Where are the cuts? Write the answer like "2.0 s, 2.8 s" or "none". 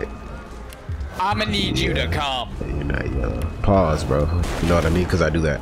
4.4 s